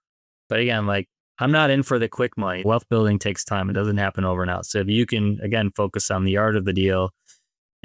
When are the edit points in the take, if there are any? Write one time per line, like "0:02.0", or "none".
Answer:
0:01.2
0:02.6

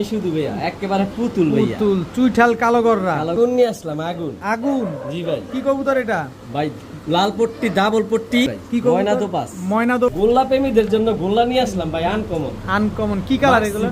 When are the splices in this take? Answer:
0:03.3
0:08.5
0:10.1

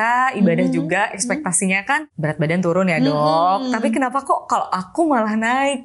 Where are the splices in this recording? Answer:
0:02.1

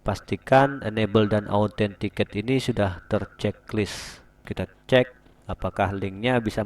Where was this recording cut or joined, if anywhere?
0:04.4

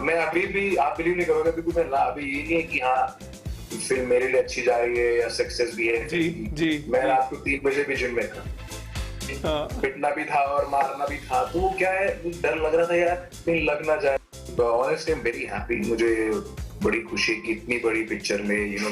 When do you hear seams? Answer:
0:08.9
0:14.2

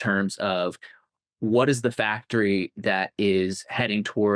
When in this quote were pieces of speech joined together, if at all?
none

